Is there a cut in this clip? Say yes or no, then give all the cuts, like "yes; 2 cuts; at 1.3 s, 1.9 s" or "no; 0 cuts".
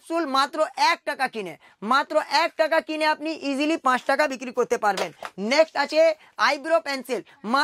no; 0 cuts